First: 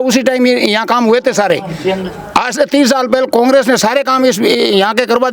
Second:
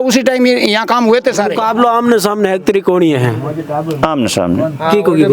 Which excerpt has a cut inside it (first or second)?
second